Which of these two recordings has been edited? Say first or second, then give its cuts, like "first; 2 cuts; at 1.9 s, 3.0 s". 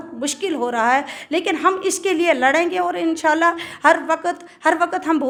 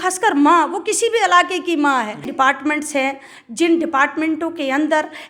second; 1 cut; at 2.3 s